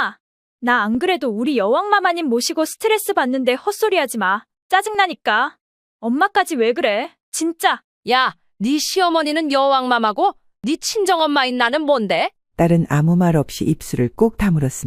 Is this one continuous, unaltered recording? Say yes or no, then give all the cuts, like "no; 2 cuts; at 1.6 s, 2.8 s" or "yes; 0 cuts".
no; 1 cut; at 7.9 s